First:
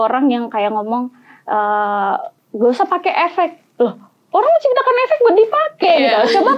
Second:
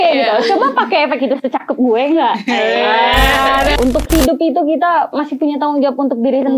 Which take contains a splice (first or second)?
second